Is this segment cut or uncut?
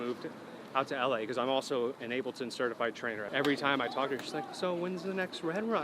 cut